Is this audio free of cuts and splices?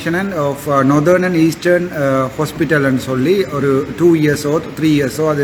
yes; 0 cuts

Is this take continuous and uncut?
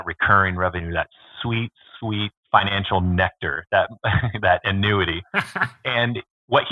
yes; 0 cuts

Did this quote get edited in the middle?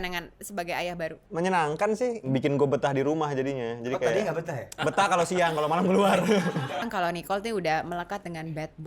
yes; 4 cuts; at 1.2 s, 2.2 s, 4.7 s, 6.8 s

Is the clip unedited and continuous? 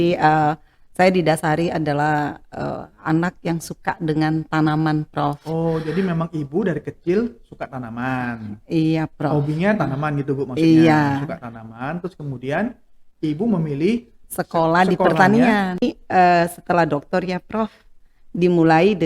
no; 1 cut; at 15.8 s

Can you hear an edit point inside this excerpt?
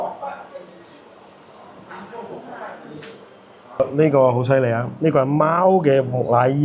yes; 1 cut; at 3.8 s

